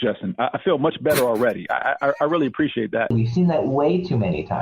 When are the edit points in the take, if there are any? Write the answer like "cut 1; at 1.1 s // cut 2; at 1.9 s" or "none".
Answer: cut 1; at 3.1 s